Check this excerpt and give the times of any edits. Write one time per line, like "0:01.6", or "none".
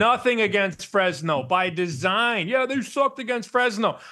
none